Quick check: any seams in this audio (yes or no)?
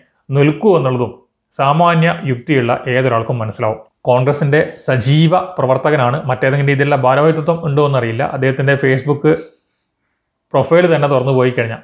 yes